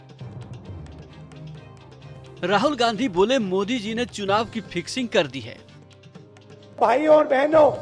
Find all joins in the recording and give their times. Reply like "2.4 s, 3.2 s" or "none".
2.4 s